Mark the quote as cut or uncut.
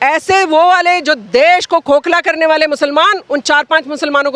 uncut